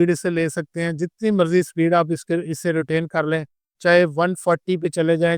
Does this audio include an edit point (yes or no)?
no